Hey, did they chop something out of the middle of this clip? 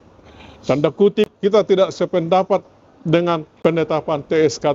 yes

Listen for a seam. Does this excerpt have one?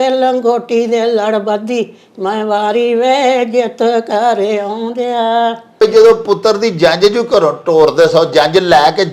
yes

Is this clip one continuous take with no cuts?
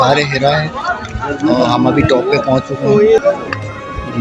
no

